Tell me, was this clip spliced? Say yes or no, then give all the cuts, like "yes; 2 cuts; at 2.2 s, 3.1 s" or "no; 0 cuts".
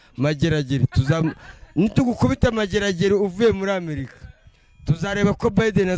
no; 0 cuts